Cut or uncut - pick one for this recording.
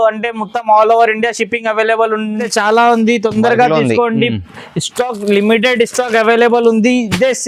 cut